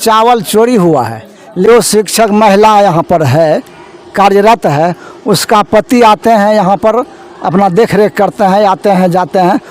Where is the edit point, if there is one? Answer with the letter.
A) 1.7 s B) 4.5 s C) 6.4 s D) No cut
A